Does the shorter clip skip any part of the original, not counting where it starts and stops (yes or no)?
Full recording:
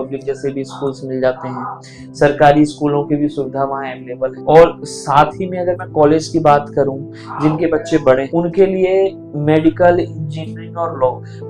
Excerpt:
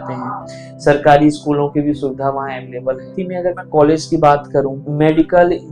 yes